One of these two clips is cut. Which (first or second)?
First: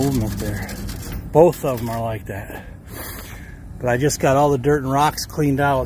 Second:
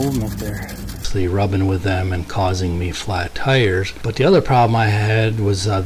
second